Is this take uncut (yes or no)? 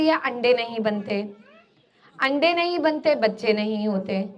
yes